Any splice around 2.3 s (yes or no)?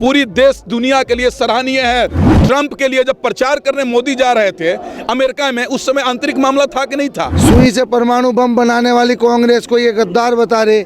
yes